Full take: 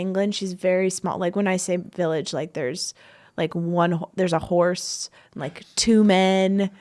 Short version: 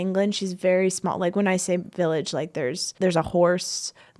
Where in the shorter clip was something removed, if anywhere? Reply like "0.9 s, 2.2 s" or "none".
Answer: 2.9 s